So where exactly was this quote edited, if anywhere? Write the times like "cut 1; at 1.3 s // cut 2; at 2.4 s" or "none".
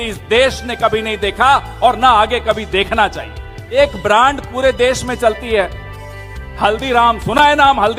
cut 1; at 3.8 s